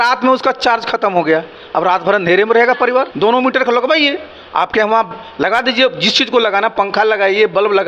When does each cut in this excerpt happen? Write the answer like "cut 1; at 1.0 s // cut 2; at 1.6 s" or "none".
cut 1; at 3.1 s